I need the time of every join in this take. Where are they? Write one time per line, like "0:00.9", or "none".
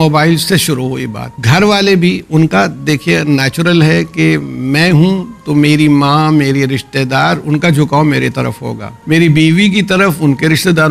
0:01.3
0:08.9

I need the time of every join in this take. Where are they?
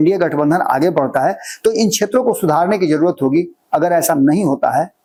none

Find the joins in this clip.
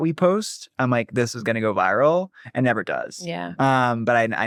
none

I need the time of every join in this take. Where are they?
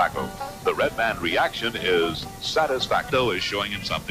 none

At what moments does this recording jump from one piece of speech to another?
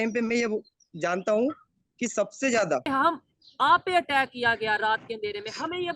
0:02.8

